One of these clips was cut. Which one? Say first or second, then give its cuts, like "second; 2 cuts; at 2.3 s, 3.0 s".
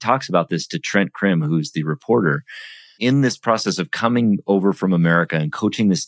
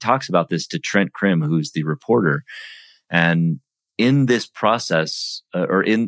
first; 1 cut; at 3.0 s